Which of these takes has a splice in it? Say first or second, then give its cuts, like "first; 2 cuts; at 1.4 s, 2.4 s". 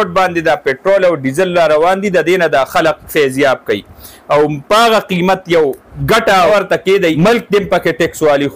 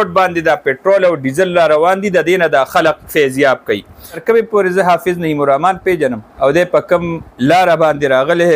second; 3 cuts; at 4.2 s, 6.2 s, 7.3 s